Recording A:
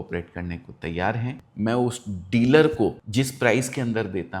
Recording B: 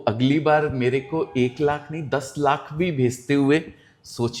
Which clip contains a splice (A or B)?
A